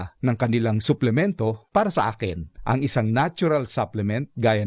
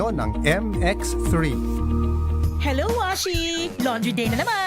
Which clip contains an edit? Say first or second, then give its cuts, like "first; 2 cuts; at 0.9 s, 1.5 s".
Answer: second; 1 cut; at 2.2 s